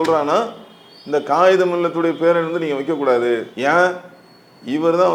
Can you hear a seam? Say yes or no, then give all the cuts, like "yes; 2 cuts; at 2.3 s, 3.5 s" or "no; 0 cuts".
no; 0 cuts